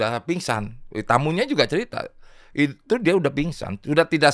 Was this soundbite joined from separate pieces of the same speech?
no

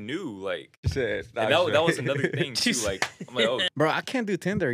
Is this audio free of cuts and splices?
no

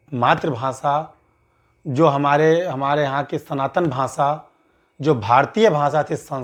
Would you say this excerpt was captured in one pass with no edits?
yes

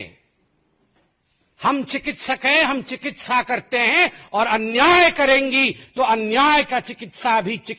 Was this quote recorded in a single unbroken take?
yes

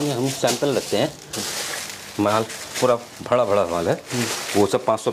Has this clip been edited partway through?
no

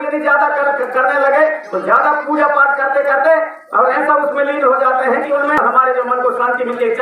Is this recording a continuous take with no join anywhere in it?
no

